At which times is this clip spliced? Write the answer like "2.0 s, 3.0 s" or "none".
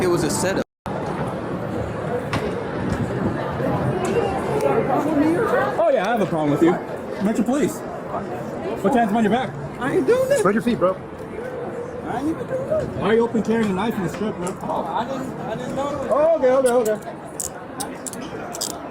1.1 s